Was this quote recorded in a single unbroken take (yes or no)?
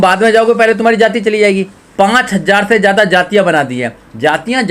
no